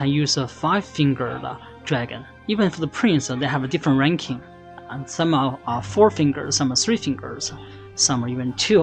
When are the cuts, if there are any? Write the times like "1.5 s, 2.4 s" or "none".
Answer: 2.3 s